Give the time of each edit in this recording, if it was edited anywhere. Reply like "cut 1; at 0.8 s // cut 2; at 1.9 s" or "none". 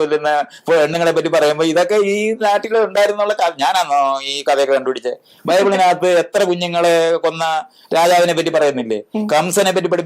none